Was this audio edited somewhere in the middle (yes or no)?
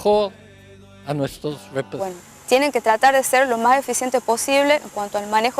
yes